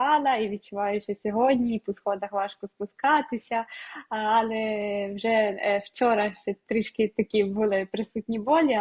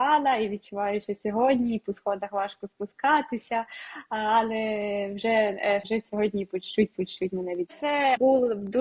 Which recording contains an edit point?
second; 2 cuts; at 5.9 s, 7.8 s

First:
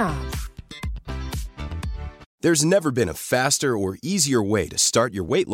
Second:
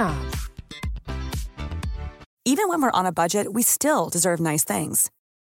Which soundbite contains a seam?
first; 1 cut; at 2.2 s

